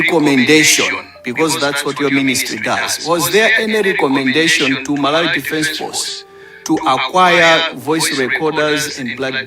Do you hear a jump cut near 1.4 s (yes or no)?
no